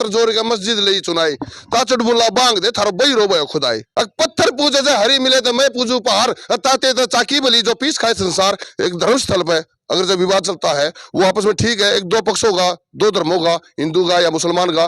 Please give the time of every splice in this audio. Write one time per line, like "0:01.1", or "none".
0:03.8
0:08.7